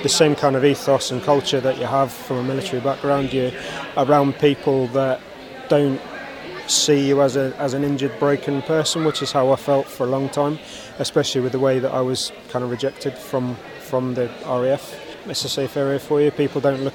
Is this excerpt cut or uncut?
cut